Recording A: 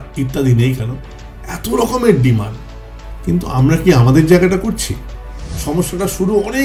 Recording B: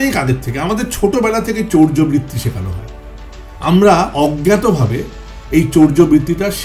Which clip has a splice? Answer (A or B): A